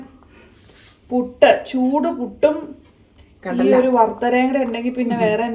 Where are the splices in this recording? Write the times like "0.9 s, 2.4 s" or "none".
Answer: none